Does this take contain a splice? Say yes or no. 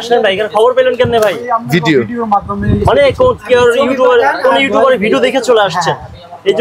no